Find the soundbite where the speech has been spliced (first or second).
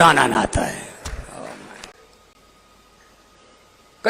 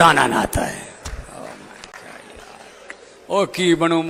first